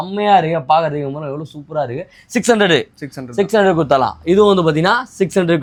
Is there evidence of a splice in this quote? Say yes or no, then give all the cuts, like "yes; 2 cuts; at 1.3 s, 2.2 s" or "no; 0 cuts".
no; 0 cuts